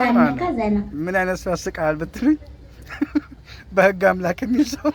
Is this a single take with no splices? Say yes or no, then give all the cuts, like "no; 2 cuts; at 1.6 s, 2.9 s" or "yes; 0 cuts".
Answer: yes; 0 cuts